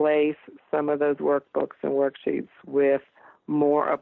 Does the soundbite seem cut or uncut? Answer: uncut